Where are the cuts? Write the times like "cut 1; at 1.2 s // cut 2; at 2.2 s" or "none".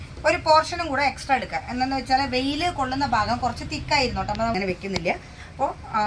cut 1; at 4.6 s

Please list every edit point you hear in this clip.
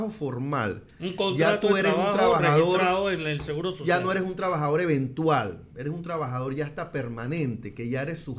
none

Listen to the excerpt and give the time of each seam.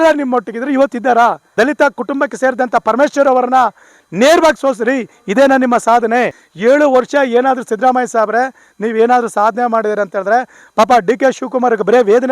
cut 1; at 1.5 s // cut 2; at 6.4 s

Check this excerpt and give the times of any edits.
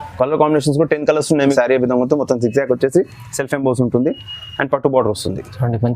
cut 1; at 1.5 s

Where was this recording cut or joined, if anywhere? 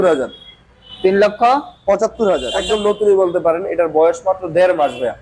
cut 1; at 2.5 s

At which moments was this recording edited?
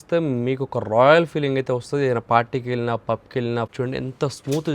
cut 1; at 3.7 s

